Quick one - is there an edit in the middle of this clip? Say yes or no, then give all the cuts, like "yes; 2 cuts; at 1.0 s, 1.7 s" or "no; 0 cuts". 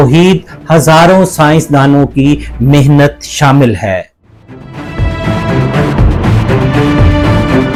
no; 0 cuts